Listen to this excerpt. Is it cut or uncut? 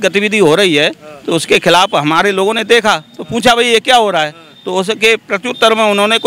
uncut